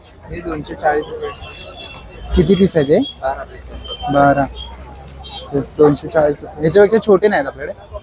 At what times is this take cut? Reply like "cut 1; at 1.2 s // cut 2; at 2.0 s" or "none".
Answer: none